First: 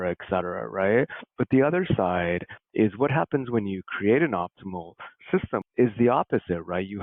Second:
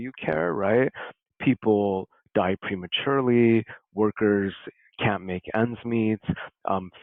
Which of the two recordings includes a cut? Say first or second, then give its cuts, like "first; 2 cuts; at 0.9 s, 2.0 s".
first; 1 cut; at 5.7 s